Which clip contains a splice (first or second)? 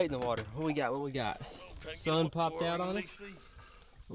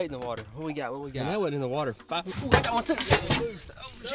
second